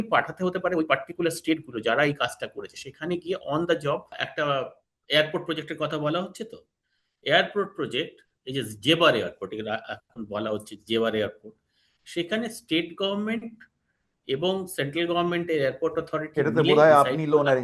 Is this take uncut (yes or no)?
no